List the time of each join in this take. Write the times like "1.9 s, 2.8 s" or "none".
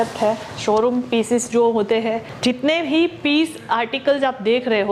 2.3 s